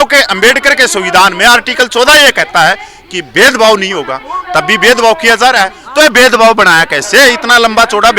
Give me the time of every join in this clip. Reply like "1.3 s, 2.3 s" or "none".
5.8 s